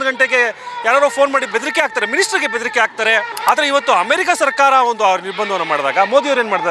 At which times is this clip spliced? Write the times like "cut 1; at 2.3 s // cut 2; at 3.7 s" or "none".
cut 1; at 3.3 s